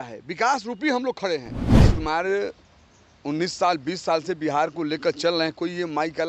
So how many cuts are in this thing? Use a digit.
1